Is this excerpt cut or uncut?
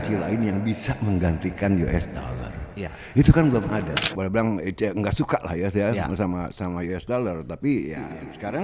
cut